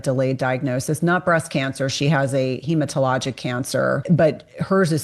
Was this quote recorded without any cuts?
no; 1 cut; at 4.0 s

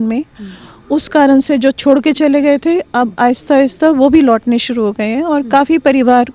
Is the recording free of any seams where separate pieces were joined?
yes; 0 cuts

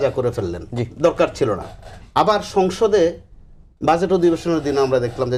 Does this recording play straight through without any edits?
yes; 0 cuts

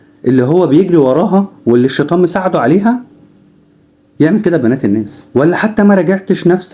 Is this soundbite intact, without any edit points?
no; 1 cut; at 5.2 s

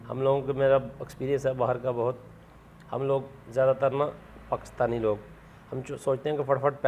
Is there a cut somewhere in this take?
no; 0 cuts

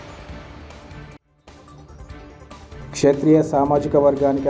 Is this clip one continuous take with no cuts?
no; 1 cut; at 2.8 s

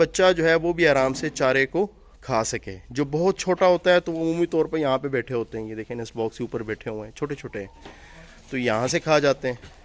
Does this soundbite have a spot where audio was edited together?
no; 0 cuts

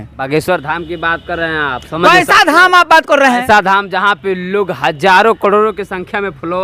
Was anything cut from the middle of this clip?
no; 0 cuts

